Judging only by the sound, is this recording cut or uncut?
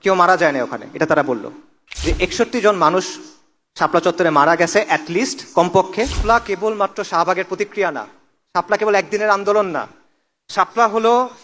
cut